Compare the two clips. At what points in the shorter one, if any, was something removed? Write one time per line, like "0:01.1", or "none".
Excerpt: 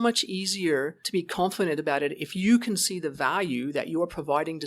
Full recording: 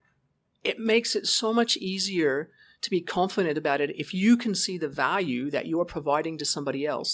0:01.0